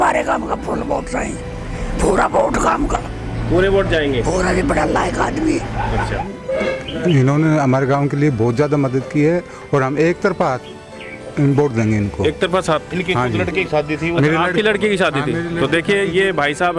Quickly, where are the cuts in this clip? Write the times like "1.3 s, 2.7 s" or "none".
6.2 s